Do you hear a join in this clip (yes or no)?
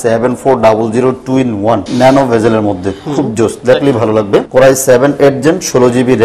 yes